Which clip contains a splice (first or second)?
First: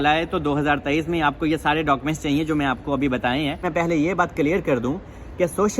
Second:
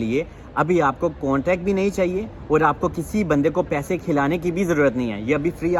first